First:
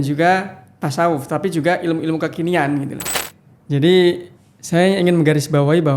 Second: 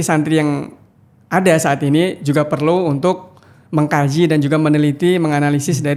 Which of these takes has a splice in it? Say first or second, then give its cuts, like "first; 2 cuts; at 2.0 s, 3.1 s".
first; 1 cut; at 3.0 s